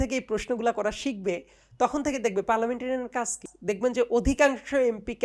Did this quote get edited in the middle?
yes; 1 cut; at 3.5 s

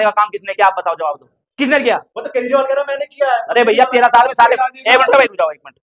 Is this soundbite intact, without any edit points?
yes; 0 cuts

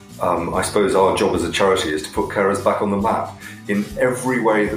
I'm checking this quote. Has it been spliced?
no; 0 cuts

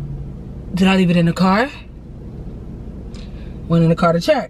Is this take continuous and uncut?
yes; 0 cuts

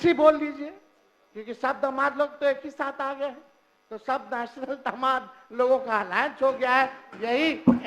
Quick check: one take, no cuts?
yes; 0 cuts

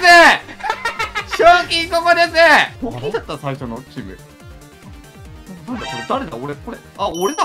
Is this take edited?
yes; 1 cut; at 2.7 s

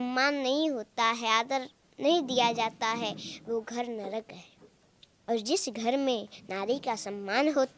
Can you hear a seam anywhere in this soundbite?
no; 0 cuts

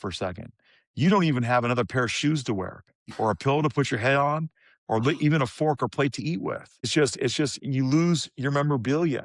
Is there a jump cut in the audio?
yes; 1 cut; at 6.9 s

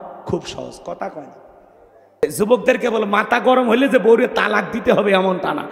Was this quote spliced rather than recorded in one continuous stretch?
yes; 1 cut; at 2.2 s

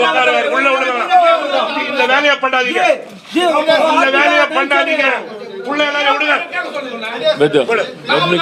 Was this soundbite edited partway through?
no; 0 cuts

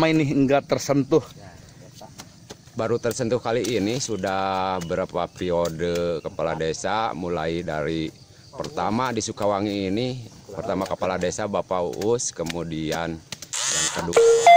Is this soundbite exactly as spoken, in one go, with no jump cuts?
no; 1 cut; at 2.1 s

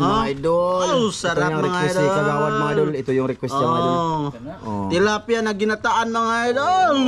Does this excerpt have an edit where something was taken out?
no; 0 cuts

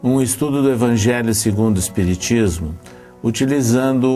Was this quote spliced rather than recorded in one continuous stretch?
yes; 1 cut; at 1.0 s

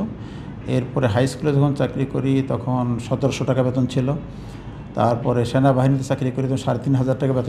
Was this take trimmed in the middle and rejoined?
no; 0 cuts

